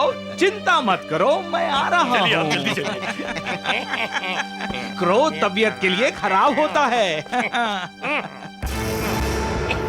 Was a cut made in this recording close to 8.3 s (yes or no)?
no